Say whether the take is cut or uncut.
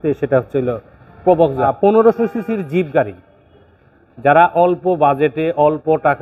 cut